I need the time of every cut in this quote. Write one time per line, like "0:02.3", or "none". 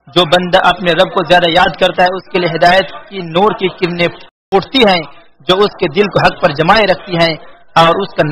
0:04.3